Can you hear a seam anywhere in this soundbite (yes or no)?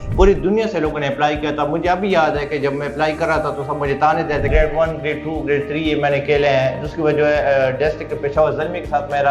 yes